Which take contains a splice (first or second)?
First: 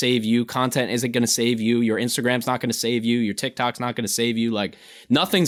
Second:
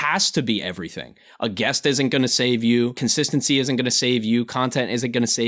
second